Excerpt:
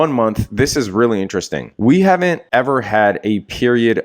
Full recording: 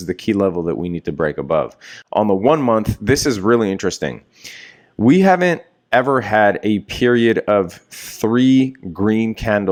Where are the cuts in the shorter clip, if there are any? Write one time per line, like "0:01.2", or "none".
0:01.6
0:02.4

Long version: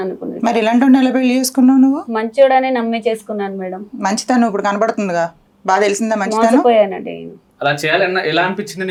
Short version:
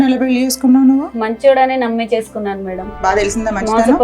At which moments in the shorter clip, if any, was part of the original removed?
0:02.8

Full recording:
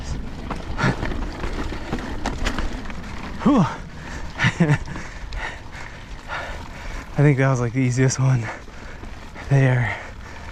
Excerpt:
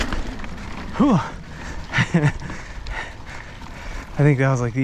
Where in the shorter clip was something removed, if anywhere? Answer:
0:03.6

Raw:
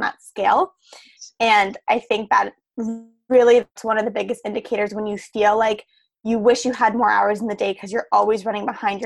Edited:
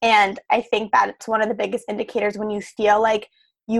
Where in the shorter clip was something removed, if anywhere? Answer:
0:01.2

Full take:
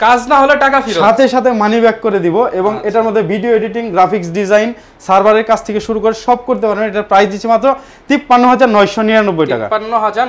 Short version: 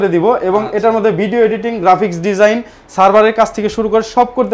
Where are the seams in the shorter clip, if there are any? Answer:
none

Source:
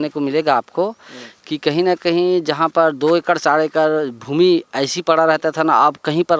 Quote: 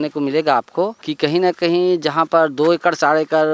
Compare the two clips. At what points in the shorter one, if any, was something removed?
0:01.0

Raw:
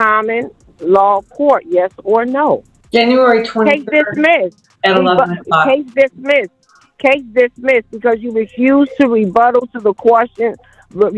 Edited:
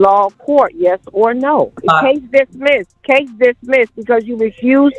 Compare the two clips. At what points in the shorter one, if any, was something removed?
0:01.8
0:02.9

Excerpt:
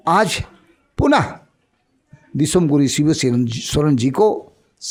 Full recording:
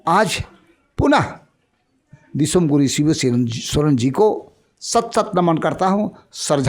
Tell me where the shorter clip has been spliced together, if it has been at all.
none

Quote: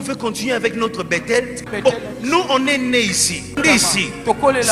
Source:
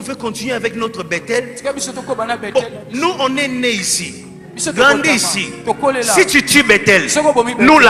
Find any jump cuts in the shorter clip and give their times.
0:01.7
0:03.6

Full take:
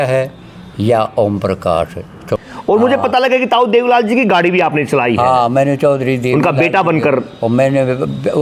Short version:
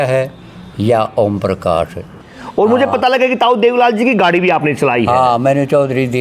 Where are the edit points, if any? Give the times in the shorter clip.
0:02.3

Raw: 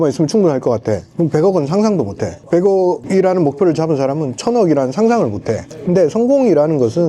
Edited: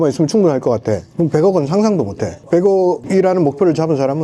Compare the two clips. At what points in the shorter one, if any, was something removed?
none

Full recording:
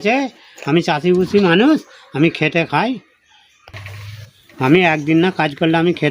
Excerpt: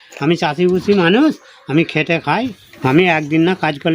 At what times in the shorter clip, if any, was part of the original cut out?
0:02.7

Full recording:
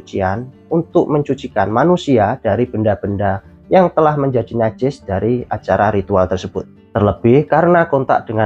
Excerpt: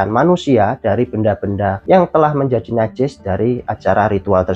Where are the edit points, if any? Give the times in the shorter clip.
0:01.8

